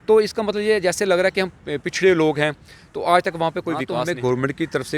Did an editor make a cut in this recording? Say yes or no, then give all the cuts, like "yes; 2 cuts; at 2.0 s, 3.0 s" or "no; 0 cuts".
yes; 1 cut; at 3.9 s